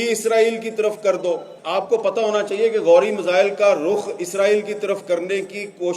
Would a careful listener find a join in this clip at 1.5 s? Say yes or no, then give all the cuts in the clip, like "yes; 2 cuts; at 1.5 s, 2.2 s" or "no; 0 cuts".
yes; 1 cut; at 1.5 s